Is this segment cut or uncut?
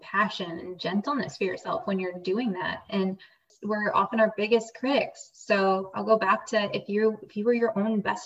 cut